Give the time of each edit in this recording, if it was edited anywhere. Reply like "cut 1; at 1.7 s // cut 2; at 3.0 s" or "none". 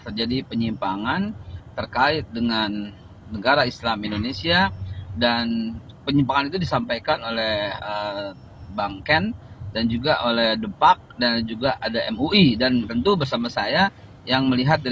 none